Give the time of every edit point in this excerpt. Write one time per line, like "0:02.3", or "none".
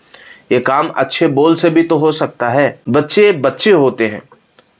0:02.8

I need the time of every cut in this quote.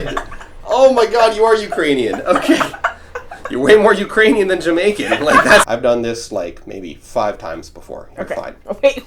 0:05.7

